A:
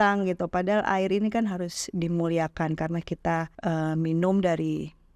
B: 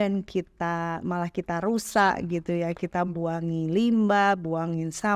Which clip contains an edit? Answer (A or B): A